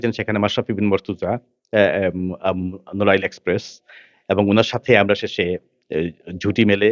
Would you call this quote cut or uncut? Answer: uncut